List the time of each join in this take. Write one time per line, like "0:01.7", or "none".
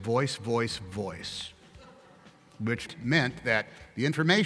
0:02.8